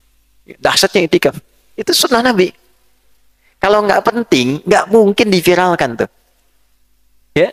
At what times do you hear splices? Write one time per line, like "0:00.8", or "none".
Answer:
0:01.8